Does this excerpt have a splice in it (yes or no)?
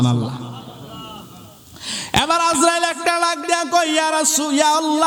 no